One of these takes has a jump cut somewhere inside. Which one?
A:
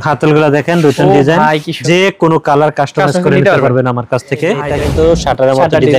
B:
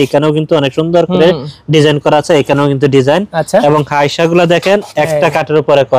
A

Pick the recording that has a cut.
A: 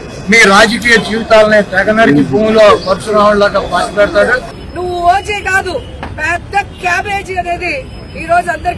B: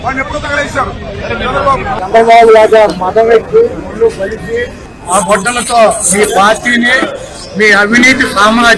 A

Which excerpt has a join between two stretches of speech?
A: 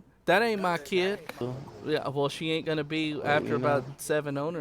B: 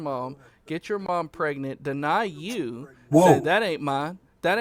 A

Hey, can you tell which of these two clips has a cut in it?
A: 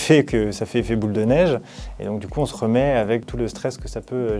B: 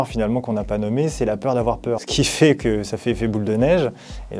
A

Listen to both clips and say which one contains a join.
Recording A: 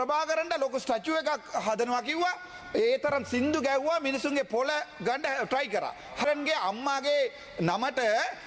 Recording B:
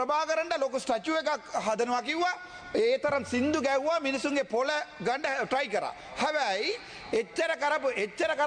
A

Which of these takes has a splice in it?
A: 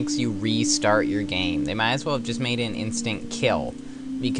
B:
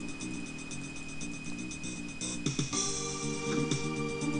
A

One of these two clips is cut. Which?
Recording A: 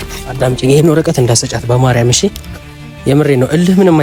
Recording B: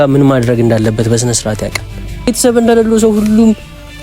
B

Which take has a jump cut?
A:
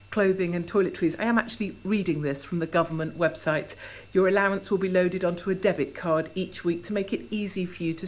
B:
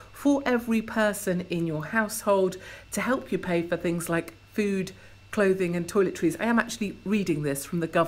B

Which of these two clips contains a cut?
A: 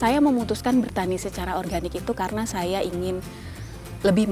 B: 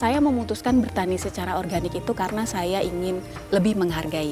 B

